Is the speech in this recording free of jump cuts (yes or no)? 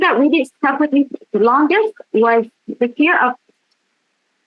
yes